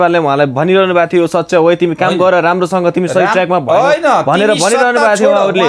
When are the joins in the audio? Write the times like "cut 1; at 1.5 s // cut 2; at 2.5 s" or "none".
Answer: none